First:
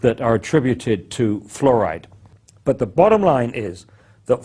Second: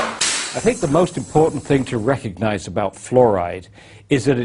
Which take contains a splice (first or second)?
first